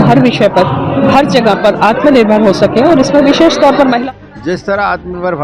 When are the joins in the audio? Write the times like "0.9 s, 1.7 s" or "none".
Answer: 4.0 s